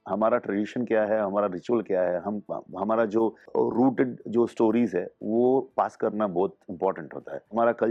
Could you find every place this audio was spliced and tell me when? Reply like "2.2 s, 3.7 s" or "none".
none